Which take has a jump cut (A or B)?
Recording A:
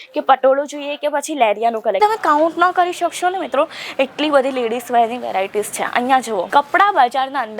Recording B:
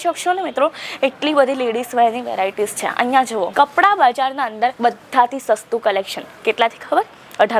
A